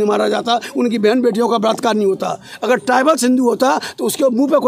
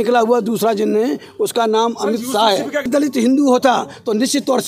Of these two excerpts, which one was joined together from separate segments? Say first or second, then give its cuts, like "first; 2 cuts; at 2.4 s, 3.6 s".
second; 1 cut; at 2.9 s